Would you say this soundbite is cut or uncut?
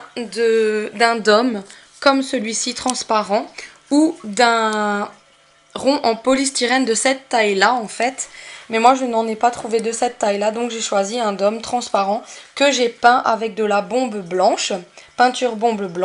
cut